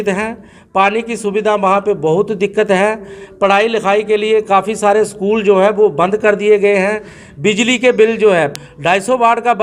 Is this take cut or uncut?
cut